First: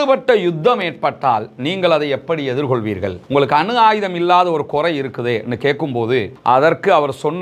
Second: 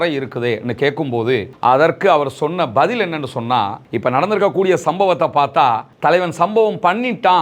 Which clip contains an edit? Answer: second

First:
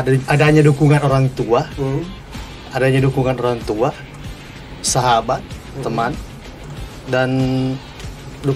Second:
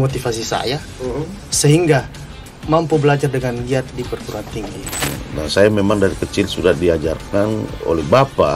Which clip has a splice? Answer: second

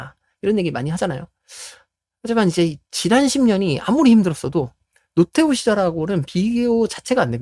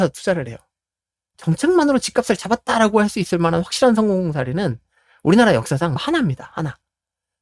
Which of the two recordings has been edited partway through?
second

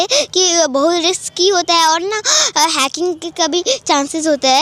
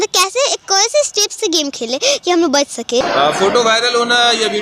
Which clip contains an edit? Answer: second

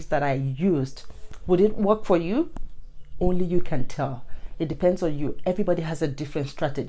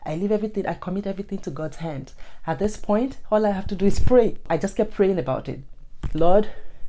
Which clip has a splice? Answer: second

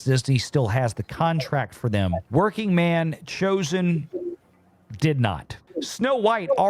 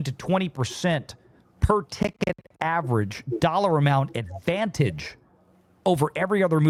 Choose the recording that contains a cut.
first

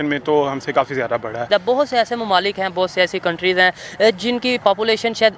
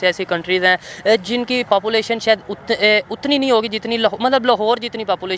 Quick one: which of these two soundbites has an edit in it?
first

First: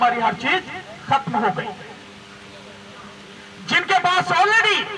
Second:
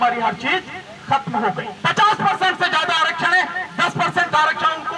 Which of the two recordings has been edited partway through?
second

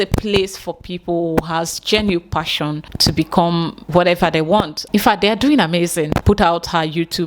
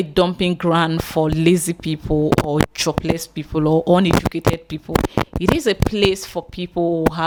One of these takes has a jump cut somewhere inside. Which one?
first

